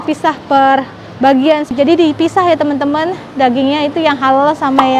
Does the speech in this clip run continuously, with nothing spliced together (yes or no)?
no